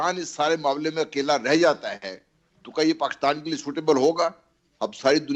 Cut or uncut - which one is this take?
uncut